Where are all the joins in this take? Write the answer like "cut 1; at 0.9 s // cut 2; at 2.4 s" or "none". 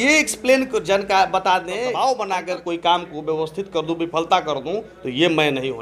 cut 1; at 1.9 s